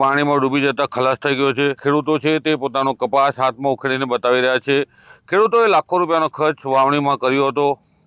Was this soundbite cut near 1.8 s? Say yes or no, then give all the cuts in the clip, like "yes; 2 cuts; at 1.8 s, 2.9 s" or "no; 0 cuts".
yes; 1 cut; at 1.8 s